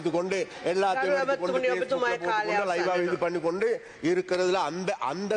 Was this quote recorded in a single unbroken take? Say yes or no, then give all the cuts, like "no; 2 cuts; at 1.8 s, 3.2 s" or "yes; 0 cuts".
yes; 0 cuts